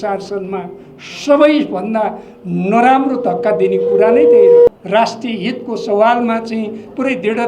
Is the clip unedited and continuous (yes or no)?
no